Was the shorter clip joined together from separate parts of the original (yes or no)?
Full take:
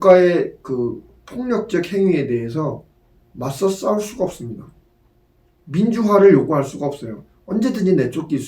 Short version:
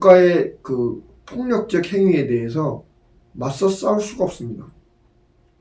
no